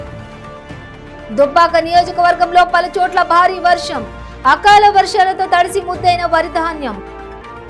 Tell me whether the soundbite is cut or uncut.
uncut